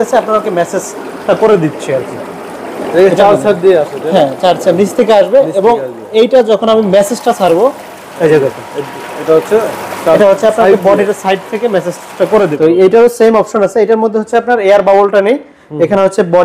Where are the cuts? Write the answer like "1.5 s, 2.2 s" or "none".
12.5 s